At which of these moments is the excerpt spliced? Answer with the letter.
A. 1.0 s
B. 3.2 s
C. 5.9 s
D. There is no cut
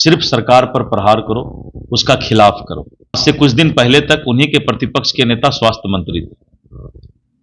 B